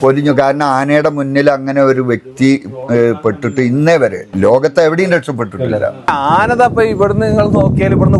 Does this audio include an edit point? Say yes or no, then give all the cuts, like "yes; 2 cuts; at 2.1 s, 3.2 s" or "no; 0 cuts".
yes; 2 cuts; at 4.3 s, 6.1 s